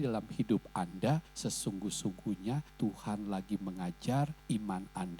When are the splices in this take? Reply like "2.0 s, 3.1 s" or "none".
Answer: 1.3 s, 2.7 s, 4.4 s